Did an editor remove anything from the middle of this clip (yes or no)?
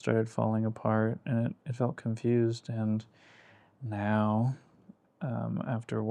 no